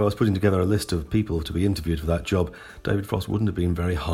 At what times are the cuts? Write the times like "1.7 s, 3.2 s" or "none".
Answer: none

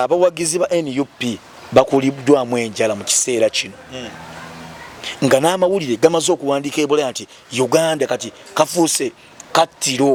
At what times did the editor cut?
none

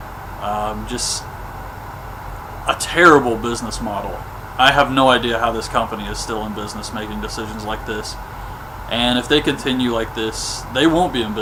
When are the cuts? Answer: none

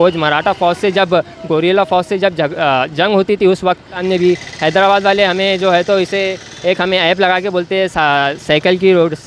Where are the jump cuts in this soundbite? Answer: 3.9 s

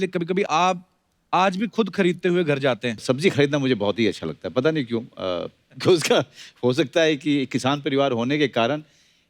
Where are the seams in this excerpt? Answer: 2.9 s

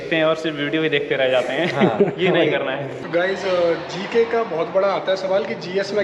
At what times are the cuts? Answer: 2.9 s

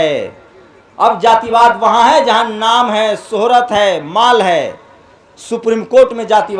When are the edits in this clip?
none

